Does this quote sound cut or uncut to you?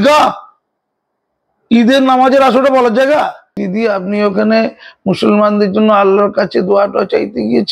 cut